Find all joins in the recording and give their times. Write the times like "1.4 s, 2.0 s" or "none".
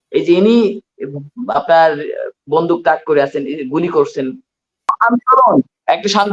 4.9 s